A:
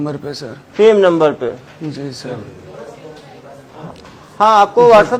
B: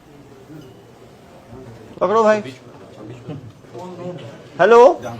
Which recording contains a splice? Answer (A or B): B